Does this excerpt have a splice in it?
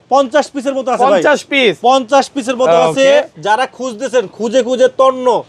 no; 0 cuts

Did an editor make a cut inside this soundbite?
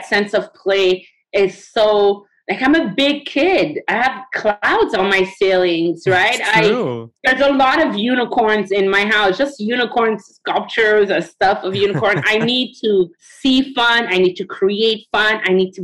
no; 0 cuts

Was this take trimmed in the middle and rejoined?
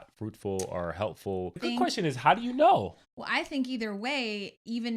yes; 1 cut; at 1.6 s

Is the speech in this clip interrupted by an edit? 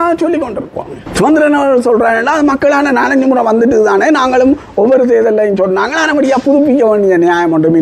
no; 0 cuts

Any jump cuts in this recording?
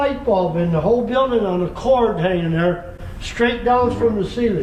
no; 0 cuts

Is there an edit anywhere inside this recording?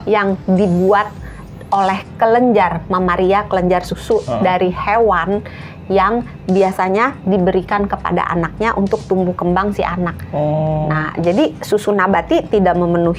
no; 0 cuts

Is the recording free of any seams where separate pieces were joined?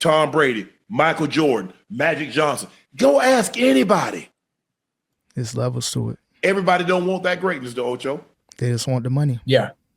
yes; 0 cuts

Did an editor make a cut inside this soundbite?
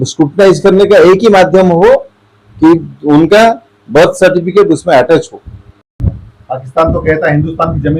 yes; 1 cut; at 6.1 s

